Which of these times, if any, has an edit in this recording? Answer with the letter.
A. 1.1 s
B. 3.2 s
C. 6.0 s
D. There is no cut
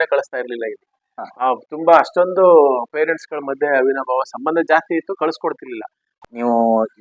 C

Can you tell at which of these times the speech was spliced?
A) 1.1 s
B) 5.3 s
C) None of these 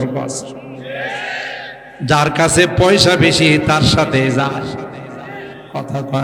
C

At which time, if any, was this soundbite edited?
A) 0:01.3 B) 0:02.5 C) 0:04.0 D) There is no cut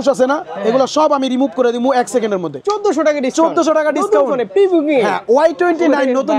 B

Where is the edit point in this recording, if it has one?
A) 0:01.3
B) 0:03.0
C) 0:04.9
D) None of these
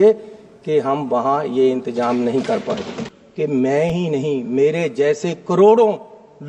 B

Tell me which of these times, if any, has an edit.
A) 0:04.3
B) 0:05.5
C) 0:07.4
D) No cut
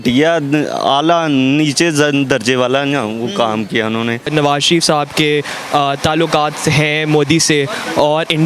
A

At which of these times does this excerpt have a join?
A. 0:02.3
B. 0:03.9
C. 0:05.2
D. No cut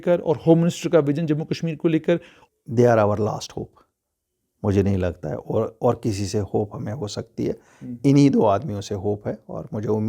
A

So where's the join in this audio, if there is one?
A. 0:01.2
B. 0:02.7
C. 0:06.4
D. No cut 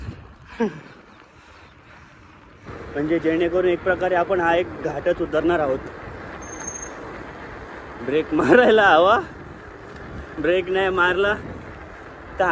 B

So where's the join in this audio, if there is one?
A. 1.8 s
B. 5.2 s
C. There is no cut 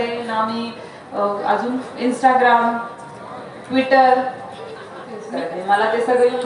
B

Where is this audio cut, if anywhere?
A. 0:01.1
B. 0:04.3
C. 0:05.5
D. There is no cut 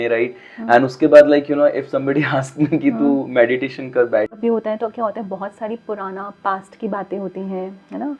B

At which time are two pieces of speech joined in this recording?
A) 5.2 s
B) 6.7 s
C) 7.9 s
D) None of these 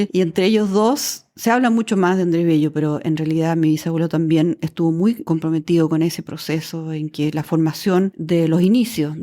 A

